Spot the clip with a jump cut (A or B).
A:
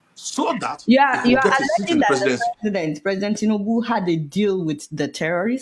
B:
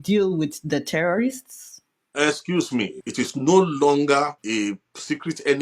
B